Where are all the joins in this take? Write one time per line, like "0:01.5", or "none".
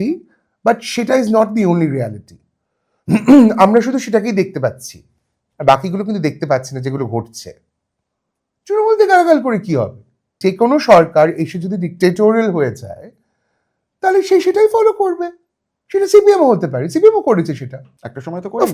0:10.3

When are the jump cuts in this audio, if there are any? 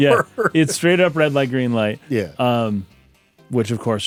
none

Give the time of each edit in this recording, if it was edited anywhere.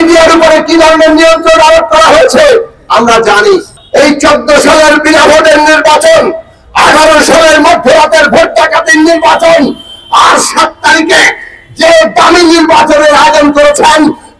0:03.8

